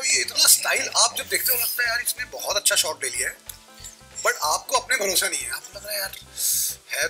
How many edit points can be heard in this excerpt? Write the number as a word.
zero